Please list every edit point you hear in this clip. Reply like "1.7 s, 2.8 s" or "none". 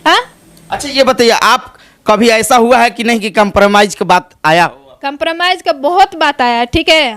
none